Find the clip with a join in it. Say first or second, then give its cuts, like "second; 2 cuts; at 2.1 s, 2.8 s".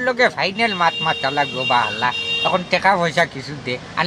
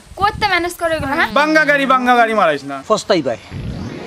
second; 2 cuts; at 1.3 s, 2.7 s